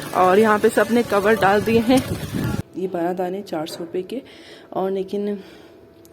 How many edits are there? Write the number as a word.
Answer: one